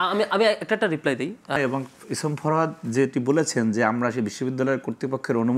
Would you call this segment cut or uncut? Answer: cut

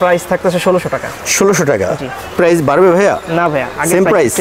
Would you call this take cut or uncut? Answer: cut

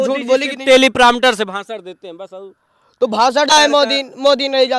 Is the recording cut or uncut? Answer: cut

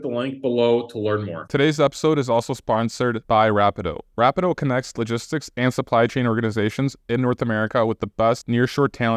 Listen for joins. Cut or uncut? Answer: cut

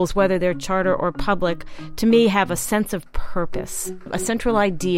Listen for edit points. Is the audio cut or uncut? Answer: cut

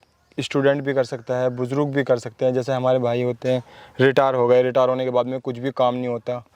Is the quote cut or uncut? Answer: uncut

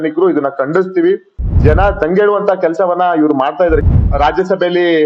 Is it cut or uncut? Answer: cut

